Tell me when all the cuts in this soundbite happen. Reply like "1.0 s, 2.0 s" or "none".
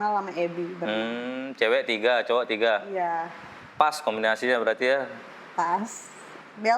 none